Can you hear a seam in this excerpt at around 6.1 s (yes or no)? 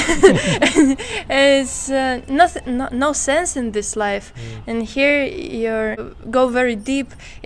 yes